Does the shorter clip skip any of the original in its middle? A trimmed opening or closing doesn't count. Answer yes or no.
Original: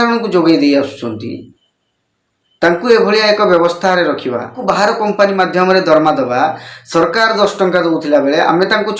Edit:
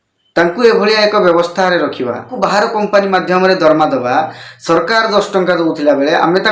no